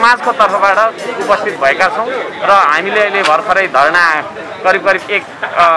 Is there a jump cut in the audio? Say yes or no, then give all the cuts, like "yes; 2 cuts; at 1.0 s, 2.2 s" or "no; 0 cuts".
no; 0 cuts